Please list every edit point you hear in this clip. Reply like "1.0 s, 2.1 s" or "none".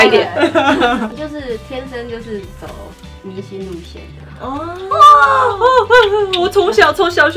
1.1 s